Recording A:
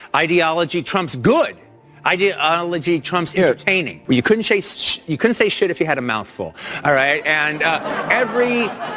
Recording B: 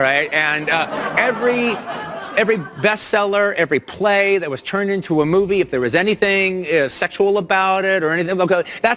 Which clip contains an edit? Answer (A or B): A